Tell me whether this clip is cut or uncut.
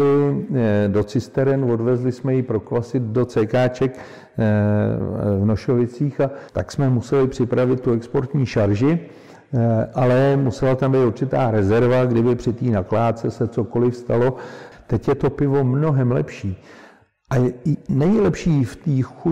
cut